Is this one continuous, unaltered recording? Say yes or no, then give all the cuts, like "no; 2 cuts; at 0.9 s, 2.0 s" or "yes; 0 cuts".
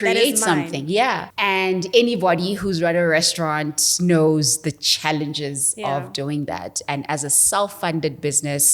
no; 1 cut; at 1.3 s